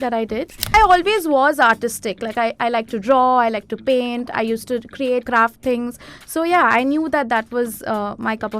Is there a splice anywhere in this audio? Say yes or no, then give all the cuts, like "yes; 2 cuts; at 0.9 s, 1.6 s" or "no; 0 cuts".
yes; 2 cuts; at 0.7 s, 5.3 s